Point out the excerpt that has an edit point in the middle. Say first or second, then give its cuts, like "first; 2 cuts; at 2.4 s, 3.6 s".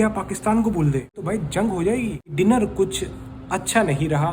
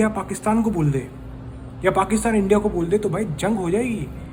first; 2 cuts; at 1.2 s, 2.2 s